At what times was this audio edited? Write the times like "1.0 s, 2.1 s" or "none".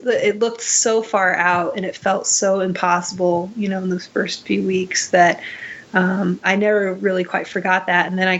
none